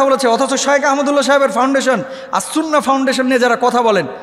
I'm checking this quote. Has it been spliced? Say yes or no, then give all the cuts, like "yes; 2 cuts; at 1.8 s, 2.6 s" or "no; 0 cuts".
no; 0 cuts